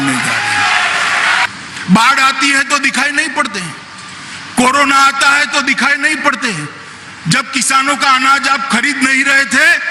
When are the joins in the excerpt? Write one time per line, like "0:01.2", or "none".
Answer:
0:01.5

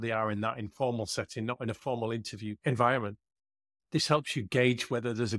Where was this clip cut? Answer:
0:02.5

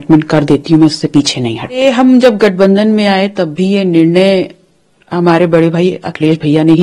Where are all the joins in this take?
0:01.8

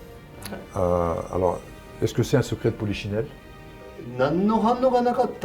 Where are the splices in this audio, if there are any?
0:03.7

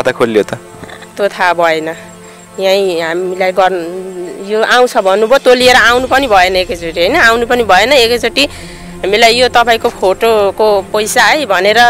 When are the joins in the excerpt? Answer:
none

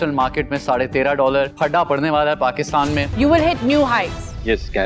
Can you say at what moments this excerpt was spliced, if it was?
0:03.1

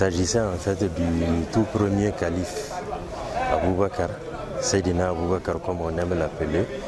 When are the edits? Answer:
none

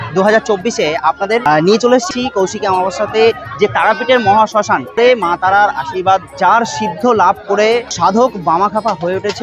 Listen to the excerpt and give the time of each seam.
0:01.4
0:02.1
0:05.0
0:06.3
0:07.9

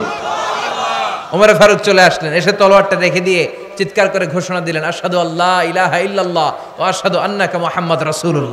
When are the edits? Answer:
none

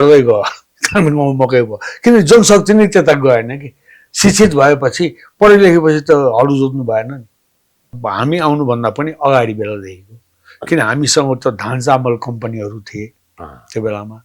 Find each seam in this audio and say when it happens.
0:07.9

